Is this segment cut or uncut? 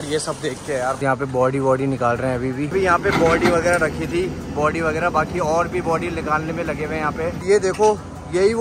cut